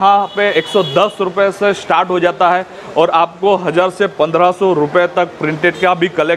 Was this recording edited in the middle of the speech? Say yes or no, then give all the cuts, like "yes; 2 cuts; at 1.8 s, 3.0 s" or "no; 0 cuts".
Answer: no; 0 cuts